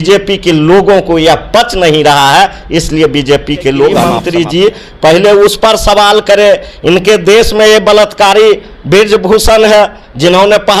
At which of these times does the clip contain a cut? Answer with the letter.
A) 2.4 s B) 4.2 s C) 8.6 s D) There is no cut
B